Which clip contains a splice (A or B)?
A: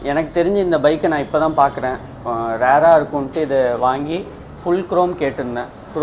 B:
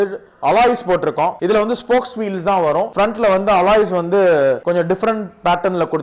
B